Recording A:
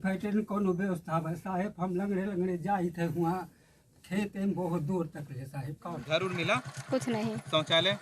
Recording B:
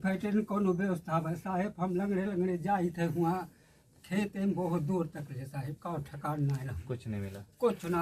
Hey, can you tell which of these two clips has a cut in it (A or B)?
A